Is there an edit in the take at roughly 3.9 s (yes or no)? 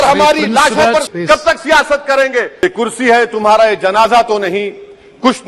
no